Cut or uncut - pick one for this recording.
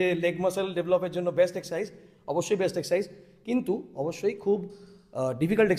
uncut